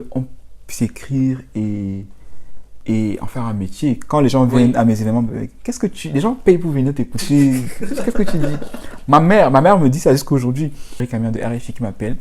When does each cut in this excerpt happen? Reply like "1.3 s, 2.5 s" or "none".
11.0 s